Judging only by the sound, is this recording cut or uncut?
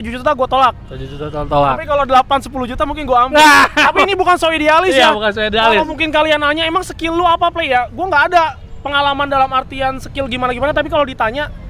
uncut